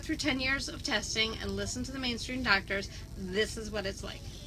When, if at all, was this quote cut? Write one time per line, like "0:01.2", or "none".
none